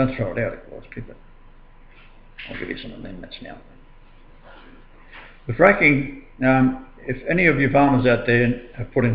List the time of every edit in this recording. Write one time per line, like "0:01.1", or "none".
0:05.9